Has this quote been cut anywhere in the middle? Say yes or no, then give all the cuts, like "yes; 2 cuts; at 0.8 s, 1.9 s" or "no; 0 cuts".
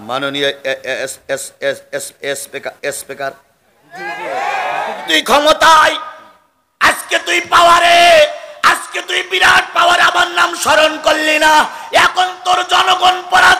yes; 1 cut; at 5.1 s